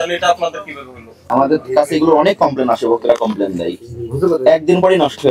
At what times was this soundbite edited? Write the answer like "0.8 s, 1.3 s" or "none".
1.1 s